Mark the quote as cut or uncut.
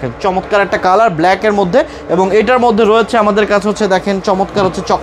uncut